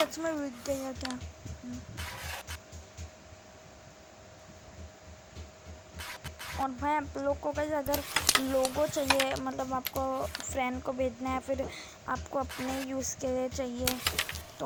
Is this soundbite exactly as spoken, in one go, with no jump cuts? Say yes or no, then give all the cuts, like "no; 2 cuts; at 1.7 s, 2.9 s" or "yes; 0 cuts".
yes; 0 cuts